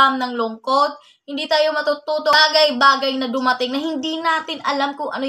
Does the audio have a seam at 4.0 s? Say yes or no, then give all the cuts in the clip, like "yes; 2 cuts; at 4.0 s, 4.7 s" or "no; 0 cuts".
no; 1 cut; at 2.3 s